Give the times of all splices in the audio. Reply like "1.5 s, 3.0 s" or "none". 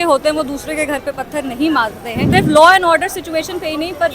2.2 s